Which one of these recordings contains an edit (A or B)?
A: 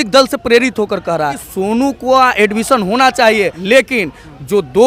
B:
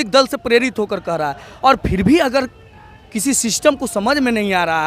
A